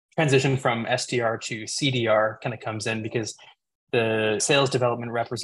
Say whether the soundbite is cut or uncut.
cut